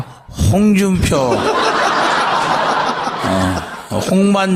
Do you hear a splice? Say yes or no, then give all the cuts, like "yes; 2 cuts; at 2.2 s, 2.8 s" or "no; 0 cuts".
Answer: no; 0 cuts